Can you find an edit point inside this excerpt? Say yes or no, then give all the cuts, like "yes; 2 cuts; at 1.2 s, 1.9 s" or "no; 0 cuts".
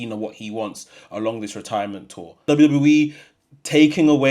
yes; 1 cut; at 2.4 s